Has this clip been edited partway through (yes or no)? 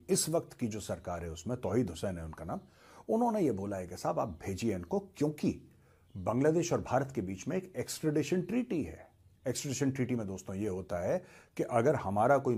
no